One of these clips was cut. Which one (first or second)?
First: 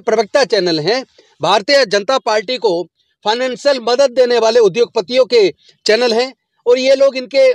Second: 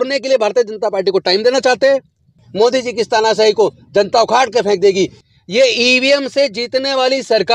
second